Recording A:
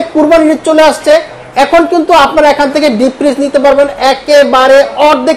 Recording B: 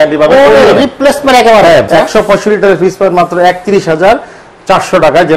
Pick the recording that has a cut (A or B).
B